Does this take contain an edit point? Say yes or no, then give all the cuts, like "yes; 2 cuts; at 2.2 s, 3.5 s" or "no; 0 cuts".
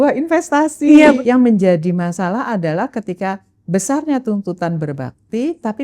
yes; 1 cut; at 1.2 s